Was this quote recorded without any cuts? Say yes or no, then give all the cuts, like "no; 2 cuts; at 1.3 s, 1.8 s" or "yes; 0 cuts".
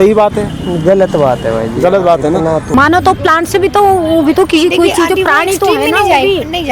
no; 1 cut; at 2.7 s